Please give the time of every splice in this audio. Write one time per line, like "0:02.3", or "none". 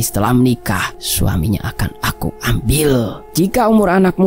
0:01.0
0:03.2